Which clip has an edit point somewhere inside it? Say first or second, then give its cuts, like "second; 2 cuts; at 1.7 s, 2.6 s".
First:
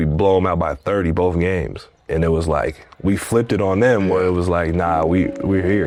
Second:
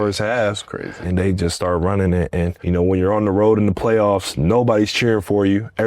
second; 2 cuts; at 1.0 s, 2.6 s